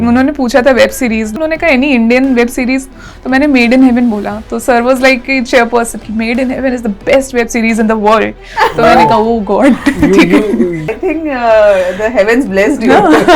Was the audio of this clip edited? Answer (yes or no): yes